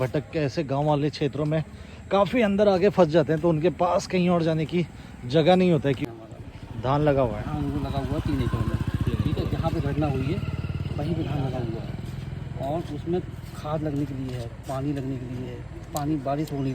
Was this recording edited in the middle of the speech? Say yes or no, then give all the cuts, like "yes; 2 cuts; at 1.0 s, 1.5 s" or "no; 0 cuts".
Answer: yes; 1 cut; at 6.0 s